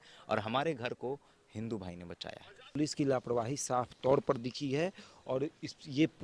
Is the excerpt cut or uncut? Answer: cut